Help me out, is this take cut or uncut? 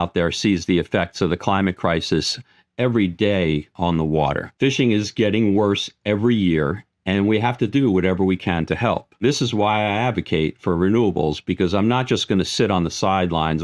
cut